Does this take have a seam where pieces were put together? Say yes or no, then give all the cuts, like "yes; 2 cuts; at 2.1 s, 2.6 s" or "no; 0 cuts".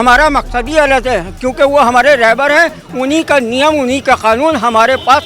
no; 0 cuts